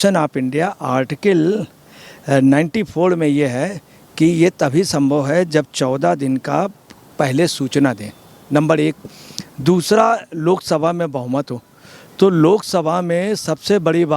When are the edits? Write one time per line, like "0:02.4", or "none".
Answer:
none